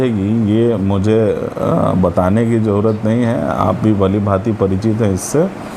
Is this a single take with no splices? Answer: yes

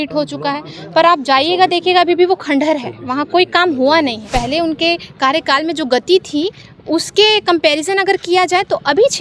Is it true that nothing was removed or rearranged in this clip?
no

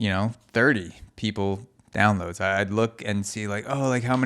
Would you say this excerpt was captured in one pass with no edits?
no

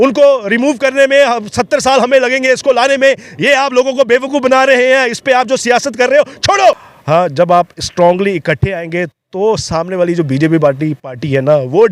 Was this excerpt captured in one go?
no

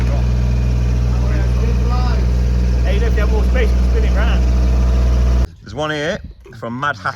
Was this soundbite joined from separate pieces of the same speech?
yes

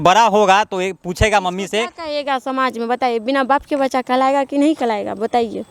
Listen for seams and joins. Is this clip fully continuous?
yes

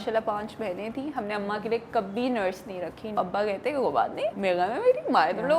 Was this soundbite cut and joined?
yes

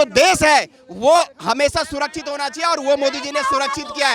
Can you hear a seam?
no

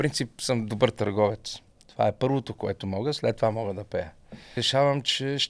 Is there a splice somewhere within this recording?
yes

